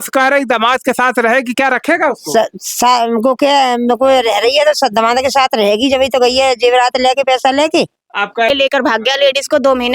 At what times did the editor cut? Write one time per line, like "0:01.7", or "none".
0:08.5